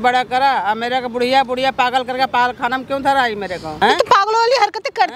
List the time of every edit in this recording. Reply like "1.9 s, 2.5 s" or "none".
3.7 s